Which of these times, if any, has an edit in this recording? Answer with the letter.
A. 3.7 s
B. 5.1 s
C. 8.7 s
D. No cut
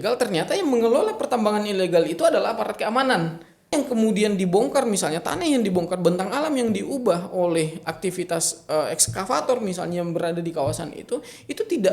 A